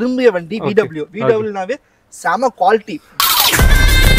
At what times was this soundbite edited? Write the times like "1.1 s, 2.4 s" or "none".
3.1 s